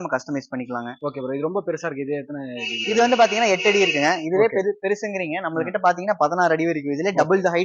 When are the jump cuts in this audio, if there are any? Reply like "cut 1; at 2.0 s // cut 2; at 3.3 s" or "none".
none